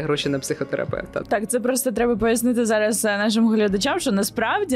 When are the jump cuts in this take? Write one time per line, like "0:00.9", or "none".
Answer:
0:01.2